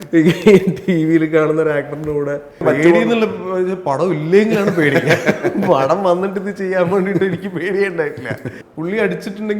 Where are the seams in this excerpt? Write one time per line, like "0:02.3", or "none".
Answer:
0:02.6
0:08.6